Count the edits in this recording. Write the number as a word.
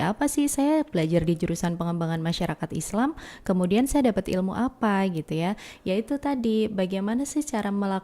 zero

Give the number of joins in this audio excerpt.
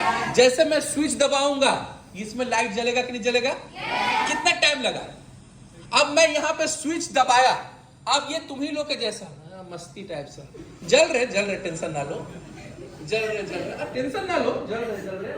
zero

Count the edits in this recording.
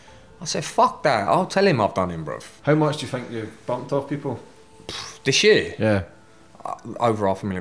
one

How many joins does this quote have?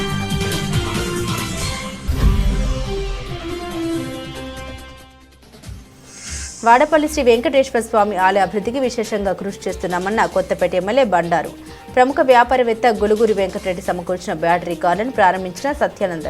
zero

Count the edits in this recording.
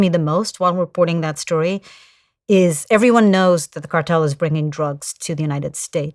zero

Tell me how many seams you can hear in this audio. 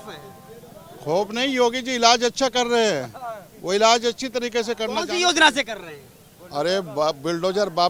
zero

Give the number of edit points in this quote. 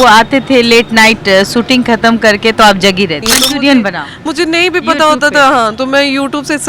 one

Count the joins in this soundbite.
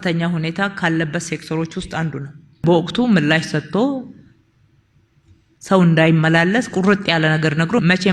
one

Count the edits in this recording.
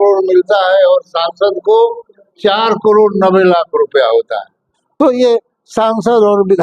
one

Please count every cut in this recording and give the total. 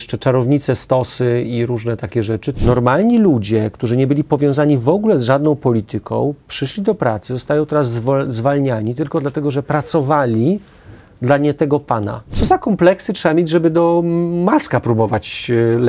two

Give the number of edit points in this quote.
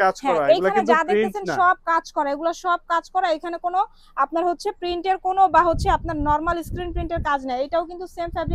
zero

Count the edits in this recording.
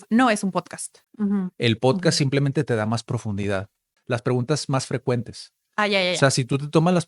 two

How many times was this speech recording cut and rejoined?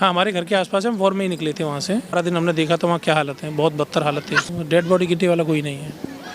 two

